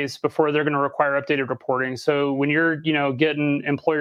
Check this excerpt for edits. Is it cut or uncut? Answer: uncut